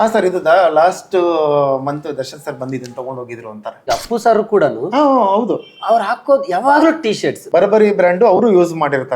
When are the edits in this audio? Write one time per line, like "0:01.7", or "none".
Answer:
0:03.7
0:07.4